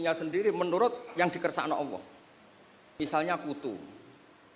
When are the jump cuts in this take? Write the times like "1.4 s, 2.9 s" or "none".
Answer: 3.0 s